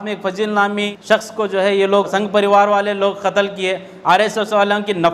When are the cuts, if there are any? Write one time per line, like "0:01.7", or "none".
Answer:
0:00.9
0:02.1